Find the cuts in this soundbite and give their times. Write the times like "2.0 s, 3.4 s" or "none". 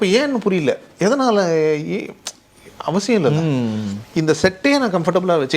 4.0 s